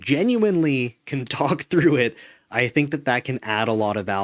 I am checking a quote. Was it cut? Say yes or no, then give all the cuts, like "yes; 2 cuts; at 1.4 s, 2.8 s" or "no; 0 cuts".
no; 0 cuts